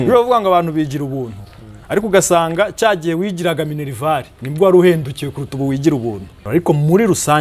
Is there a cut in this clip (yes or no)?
yes